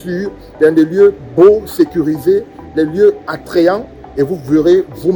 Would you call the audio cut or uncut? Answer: uncut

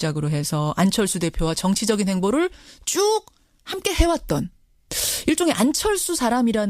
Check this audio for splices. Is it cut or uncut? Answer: cut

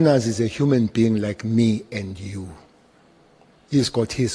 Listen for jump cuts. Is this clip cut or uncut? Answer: uncut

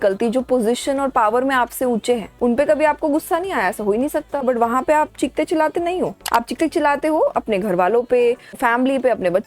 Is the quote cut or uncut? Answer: cut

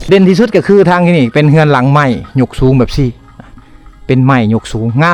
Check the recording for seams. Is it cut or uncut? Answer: uncut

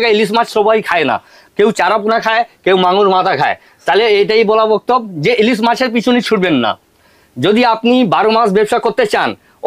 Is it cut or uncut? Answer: uncut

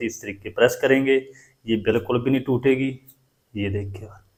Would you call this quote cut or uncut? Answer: uncut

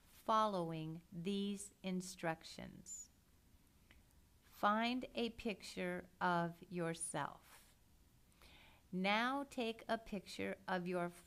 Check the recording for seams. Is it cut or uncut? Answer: uncut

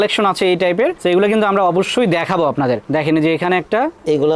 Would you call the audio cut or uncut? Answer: uncut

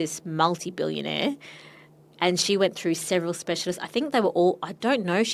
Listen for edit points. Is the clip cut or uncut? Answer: uncut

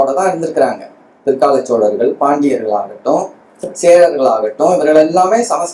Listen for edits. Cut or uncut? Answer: uncut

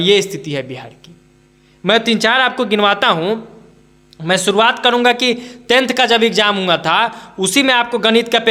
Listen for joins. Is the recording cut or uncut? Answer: uncut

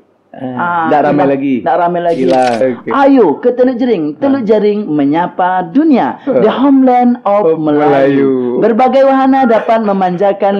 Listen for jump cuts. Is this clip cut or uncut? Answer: cut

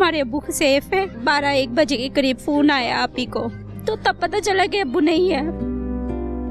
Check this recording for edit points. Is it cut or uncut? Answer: cut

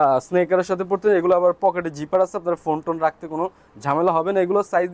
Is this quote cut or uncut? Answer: uncut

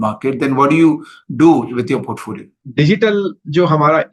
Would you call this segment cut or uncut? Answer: cut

